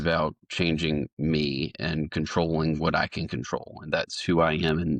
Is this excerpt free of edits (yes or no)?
yes